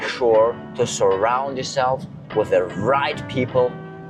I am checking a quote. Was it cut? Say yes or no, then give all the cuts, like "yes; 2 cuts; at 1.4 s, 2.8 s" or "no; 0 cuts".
no; 0 cuts